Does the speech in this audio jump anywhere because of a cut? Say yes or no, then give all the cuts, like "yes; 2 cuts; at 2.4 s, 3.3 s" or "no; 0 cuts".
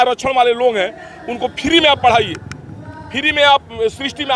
no; 0 cuts